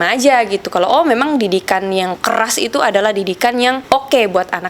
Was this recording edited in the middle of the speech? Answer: yes; 1 cut; at 3.8 s

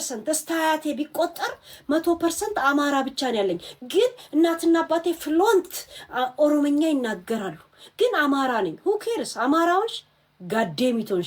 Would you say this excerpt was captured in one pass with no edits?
yes; 0 cuts

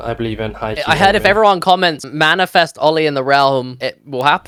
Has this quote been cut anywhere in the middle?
no; 0 cuts

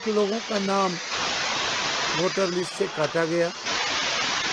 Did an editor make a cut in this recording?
no; 0 cuts

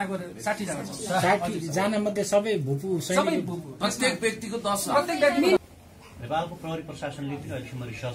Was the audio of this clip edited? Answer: yes; 1 cut; at 5.6 s

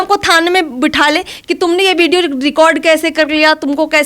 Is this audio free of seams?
yes; 0 cuts

